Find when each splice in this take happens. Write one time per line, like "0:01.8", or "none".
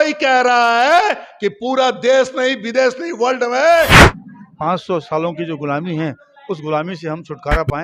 0:04.0